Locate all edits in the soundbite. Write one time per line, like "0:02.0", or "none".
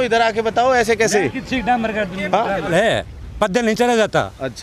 0:02.7